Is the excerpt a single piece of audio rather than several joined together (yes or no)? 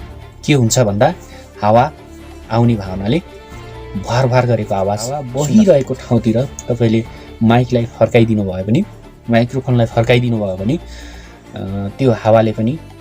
no